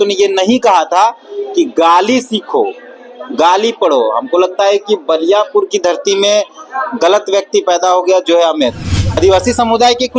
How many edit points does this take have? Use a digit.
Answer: 1